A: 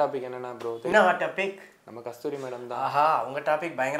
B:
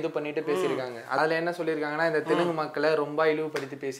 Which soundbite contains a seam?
A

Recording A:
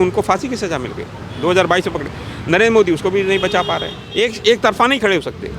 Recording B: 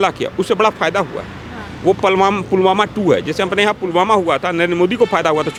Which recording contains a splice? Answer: A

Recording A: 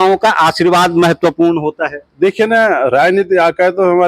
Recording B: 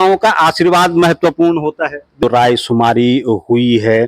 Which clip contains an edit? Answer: B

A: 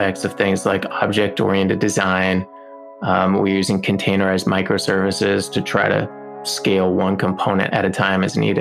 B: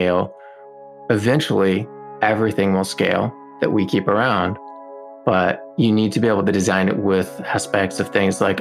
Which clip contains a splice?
A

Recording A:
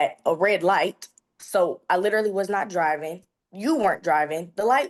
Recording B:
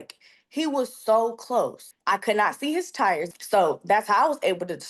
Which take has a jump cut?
B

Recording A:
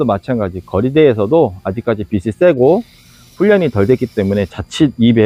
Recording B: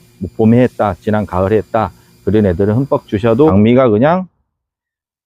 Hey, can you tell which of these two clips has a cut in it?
B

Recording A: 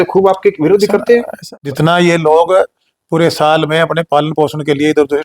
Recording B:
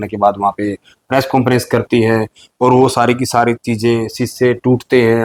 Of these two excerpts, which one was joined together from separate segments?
A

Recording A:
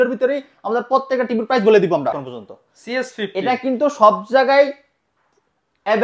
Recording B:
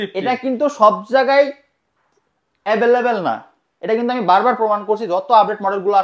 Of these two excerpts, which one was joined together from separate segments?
A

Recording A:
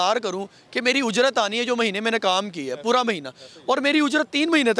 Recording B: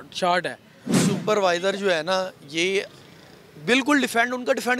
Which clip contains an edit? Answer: B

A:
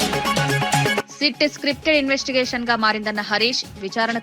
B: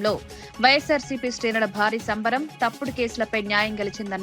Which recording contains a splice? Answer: A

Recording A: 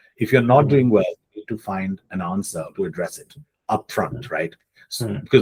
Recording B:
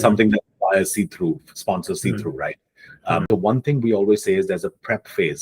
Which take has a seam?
B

